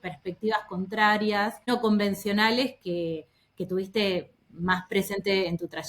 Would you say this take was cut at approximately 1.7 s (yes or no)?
yes